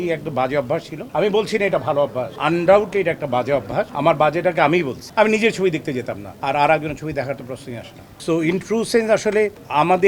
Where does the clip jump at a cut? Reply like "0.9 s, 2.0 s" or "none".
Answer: none